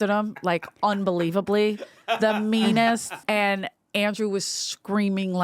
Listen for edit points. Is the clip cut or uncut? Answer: cut